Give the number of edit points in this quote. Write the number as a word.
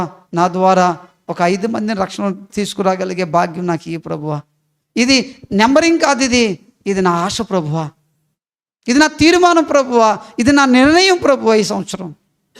zero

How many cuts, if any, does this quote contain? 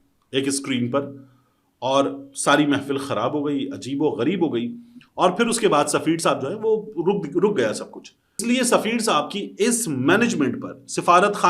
one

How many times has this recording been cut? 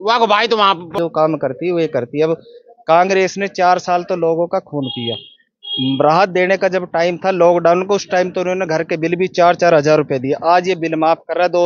one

